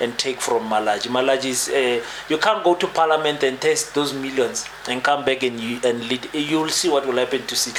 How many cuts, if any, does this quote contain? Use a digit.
0